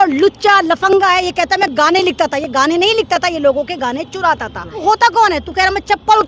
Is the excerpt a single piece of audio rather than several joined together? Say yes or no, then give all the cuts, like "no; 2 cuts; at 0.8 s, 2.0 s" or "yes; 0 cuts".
no; 1 cut; at 4.8 s